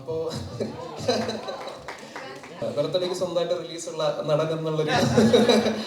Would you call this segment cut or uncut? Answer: cut